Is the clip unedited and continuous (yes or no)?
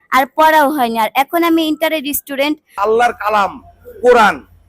no